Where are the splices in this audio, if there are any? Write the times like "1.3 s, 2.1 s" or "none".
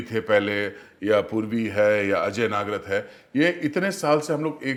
none